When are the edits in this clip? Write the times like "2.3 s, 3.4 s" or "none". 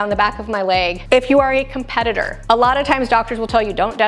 1.0 s